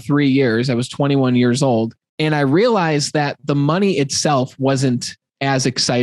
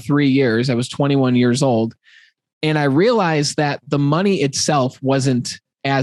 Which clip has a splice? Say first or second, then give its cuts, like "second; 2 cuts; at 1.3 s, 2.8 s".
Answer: first; 1 cut; at 2.0 s